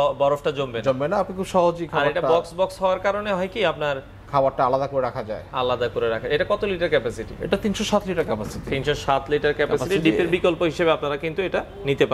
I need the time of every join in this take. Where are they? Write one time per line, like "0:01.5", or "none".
none